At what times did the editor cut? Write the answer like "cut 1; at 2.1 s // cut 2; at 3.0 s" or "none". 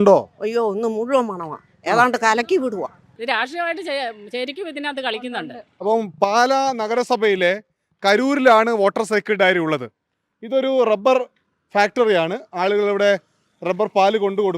cut 1; at 3.1 s